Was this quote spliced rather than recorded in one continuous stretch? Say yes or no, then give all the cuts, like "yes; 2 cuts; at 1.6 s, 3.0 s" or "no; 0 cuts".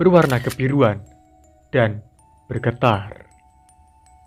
no; 0 cuts